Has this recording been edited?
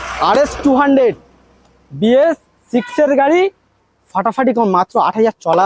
no; 0 cuts

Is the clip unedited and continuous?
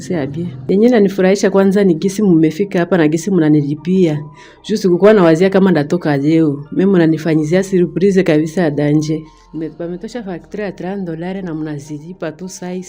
yes; 0 cuts

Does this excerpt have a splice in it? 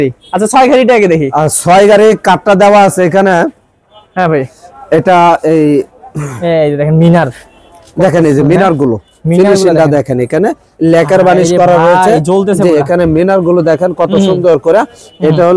no; 0 cuts

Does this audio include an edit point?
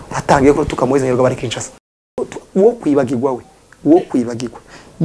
yes; 1 cut; at 2.1 s

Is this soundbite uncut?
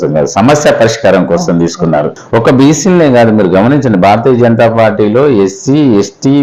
no; 1 cut; at 2.2 s

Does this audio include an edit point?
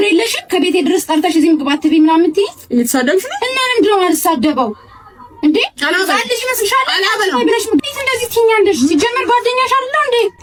no; 0 cuts

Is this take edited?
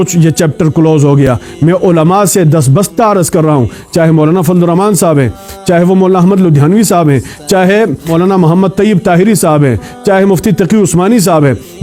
no; 0 cuts

